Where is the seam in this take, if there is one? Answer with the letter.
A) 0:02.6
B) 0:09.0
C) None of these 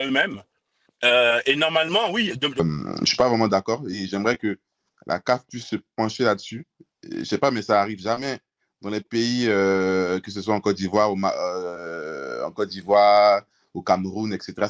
A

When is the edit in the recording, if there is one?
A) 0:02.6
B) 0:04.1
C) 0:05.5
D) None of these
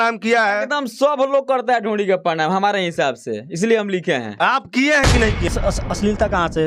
C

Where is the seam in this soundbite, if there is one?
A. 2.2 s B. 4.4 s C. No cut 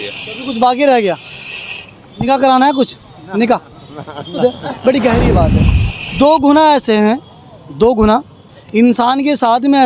B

